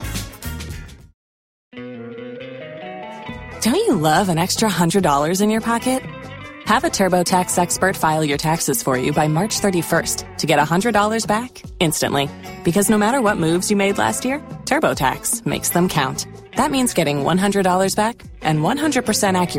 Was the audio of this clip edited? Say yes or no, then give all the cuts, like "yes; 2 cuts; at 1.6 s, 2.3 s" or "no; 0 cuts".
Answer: yes; 1 cut; at 1.7 s